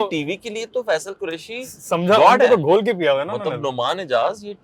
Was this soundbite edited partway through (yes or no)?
no